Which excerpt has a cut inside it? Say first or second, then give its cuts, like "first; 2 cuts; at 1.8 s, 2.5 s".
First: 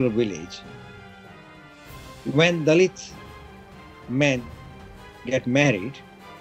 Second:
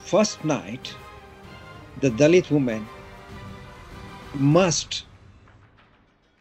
second; 3 cuts; at 2.9 s, 4.2 s, 4.9 s